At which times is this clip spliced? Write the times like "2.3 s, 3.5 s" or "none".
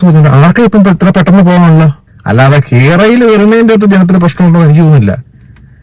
2.1 s